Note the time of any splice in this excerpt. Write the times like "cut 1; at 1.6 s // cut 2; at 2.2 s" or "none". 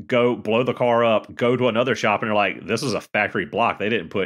cut 1; at 1.3 s